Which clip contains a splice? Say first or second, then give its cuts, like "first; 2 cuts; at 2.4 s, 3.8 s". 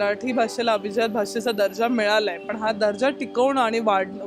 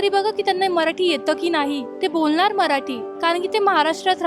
second; 2 cuts; at 1.9 s, 3.0 s